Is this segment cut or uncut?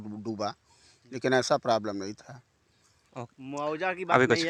uncut